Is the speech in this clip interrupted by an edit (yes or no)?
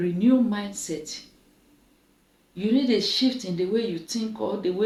no